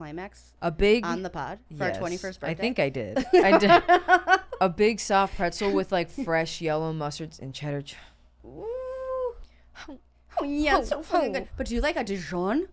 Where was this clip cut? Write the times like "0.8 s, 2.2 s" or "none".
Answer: none